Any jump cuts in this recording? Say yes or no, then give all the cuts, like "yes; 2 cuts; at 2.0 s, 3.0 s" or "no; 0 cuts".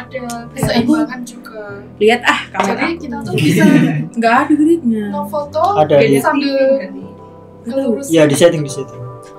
no; 0 cuts